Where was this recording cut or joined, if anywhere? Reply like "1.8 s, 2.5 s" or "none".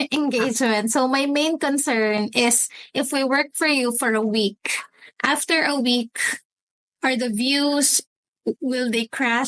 none